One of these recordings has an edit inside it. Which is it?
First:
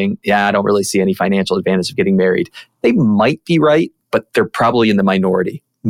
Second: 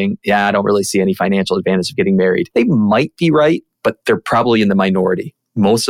second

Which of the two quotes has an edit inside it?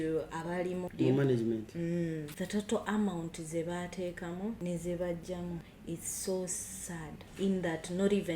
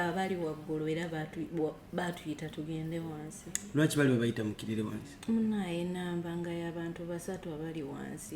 first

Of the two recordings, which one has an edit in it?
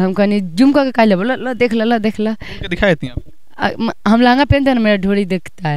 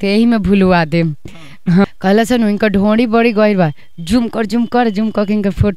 second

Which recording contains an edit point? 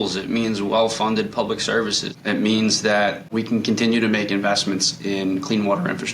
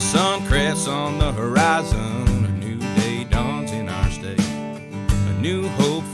first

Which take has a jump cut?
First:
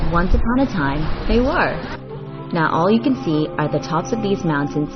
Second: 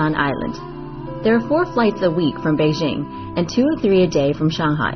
first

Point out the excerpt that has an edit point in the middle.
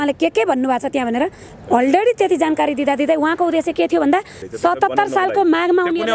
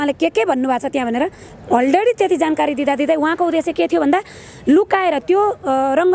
first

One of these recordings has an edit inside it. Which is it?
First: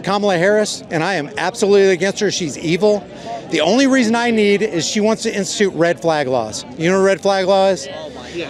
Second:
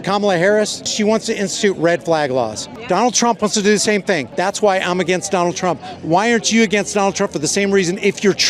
second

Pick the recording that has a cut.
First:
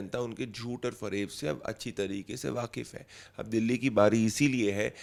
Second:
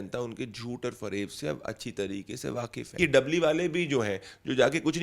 second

